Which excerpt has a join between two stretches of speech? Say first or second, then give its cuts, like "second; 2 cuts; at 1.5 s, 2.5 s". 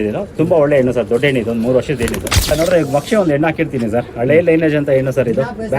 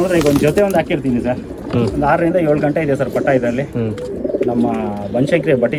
first; 1 cut; at 2.5 s